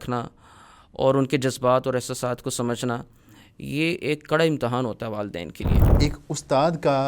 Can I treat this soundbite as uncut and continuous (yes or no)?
no